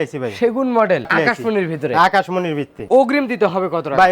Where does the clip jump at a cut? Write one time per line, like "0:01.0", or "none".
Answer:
0:01.1
0:02.8